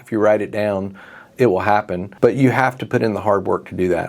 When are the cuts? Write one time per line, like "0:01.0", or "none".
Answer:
0:02.0